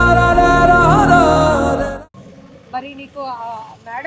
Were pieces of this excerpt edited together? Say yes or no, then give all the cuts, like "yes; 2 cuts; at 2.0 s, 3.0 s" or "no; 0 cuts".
no; 0 cuts